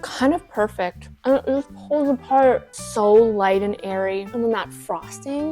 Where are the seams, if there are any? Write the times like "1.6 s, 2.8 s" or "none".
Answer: 2.7 s, 4.3 s